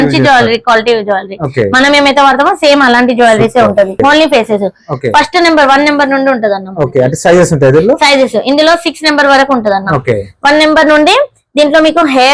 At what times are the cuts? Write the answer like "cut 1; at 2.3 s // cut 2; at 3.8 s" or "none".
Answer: cut 1; at 4.0 s